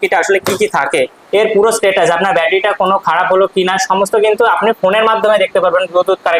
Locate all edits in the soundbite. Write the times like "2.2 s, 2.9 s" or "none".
1.2 s